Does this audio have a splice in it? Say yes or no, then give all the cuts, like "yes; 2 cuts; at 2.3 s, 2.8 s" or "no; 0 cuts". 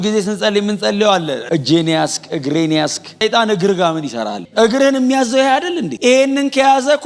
yes; 2 cuts; at 1.4 s, 3.2 s